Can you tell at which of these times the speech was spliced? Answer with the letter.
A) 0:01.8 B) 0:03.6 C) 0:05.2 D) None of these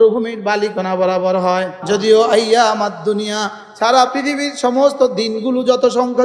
A